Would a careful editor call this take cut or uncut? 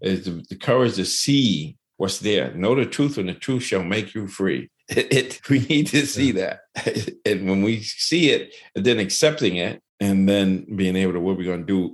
cut